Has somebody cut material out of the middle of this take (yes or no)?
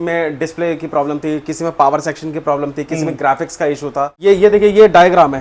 yes